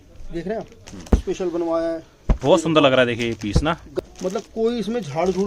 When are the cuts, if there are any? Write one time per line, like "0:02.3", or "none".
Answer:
0:01.1
0:03.9